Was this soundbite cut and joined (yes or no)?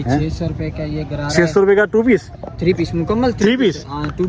no